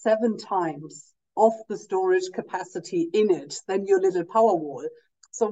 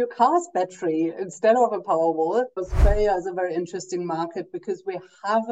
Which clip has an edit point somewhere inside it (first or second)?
second